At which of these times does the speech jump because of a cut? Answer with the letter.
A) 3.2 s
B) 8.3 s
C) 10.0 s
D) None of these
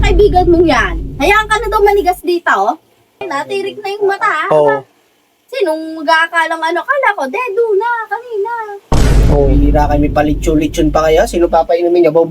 A